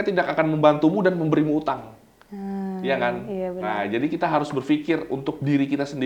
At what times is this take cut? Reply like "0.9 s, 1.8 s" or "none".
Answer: none